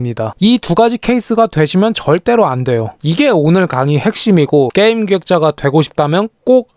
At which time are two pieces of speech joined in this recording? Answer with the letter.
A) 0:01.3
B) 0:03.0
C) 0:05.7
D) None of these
B